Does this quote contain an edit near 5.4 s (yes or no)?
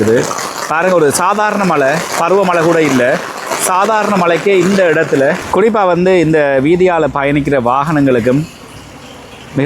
yes